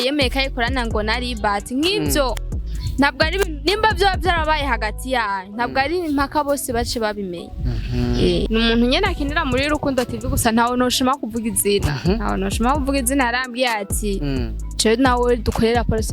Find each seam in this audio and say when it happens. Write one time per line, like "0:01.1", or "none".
0:08.5